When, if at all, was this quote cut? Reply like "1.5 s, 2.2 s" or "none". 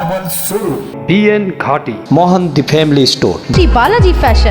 0.9 s